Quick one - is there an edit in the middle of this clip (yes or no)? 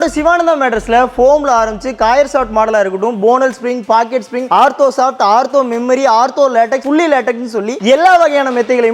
no